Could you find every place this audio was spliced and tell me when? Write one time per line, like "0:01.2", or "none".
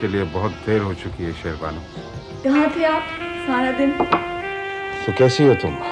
0:02.4